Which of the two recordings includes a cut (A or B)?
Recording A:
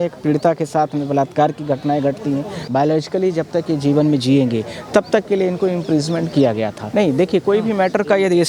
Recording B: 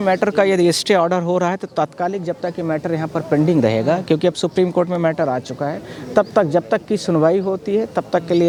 A